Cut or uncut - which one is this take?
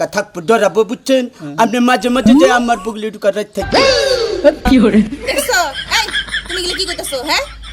uncut